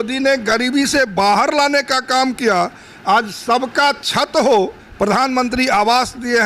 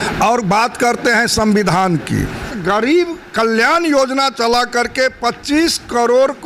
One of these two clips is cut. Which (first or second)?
second